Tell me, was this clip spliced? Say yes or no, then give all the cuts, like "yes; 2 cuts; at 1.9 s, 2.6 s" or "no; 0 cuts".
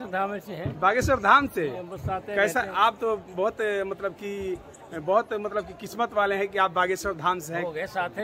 no; 0 cuts